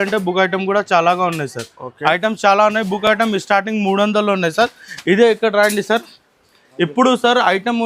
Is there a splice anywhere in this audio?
no; 0 cuts

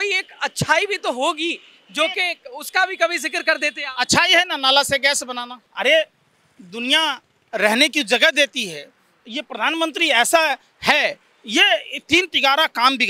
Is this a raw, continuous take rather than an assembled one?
no; 1 cut; at 5.6 s

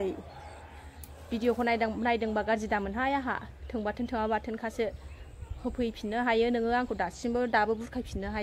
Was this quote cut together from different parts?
no; 0 cuts

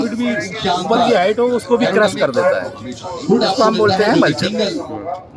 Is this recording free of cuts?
yes; 0 cuts

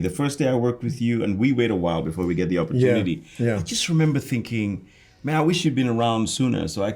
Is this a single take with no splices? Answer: yes; 0 cuts

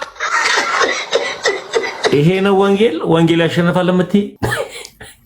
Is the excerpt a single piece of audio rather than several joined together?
no; 1 cut; at 4.3 s

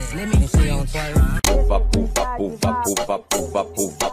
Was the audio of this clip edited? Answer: yes; 1 cut; at 1.4 s

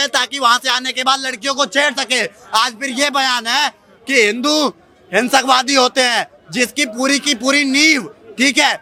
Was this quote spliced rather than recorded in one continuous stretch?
no; 0 cuts

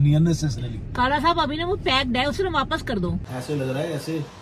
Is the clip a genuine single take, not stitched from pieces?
no; 1 cut; at 3.3 s

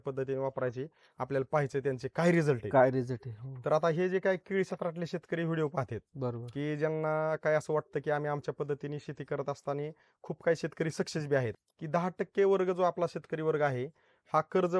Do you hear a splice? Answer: yes; 1 cut; at 11.6 s

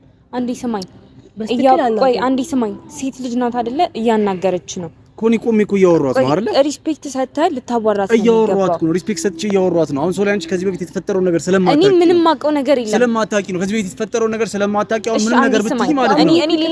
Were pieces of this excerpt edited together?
no; 0 cuts

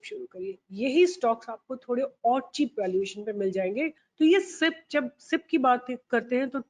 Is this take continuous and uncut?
no; 1 cut; at 4.0 s

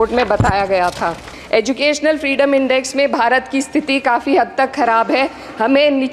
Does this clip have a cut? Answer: yes; 1 cut; at 1.3 s

